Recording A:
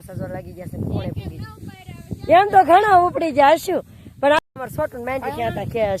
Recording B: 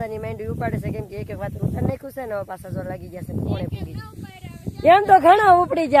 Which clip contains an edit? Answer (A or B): A